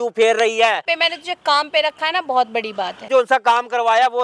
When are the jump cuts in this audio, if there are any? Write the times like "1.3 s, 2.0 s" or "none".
0.8 s, 3.1 s